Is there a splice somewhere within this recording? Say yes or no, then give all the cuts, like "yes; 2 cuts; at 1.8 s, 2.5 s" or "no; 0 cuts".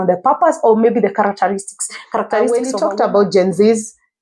yes; 1 cut; at 2.5 s